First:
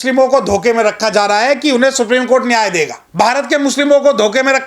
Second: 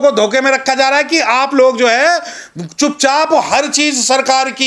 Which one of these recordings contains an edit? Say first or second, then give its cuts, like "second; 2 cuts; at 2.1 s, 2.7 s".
first; 1 cut; at 3.0 s